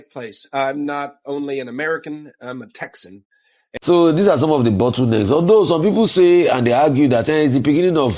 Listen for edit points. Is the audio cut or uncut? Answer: cut